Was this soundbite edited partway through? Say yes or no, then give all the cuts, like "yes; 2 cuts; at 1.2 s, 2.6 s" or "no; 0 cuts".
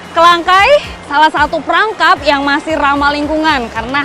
yes; 1 cut; at 1.0 s